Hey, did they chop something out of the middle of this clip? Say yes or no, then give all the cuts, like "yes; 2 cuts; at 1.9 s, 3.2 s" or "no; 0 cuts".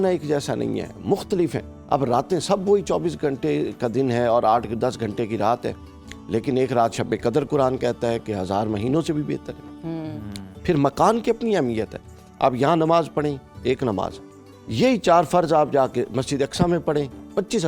no; 0 cuts